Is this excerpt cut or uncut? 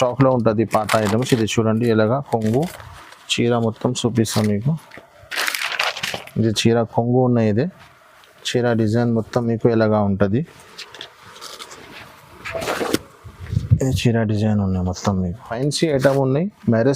cut